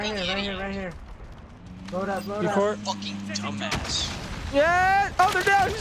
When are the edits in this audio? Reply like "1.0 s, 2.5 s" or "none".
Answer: none